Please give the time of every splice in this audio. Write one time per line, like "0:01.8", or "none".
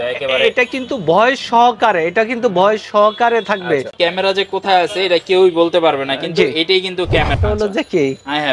0:03.9
0:07.4